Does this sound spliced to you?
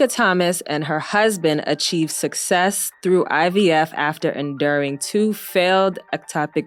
no; 0 cuts

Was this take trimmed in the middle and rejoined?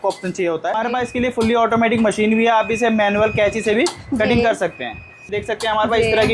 yes; 2 cuts; at 0.8 s, 5.3 s

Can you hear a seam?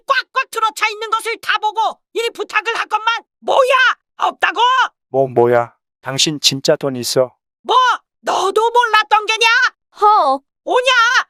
no; 0 cuts

